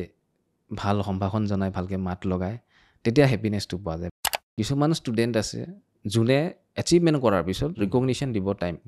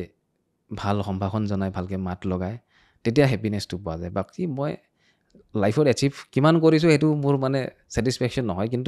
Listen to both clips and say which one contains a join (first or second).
first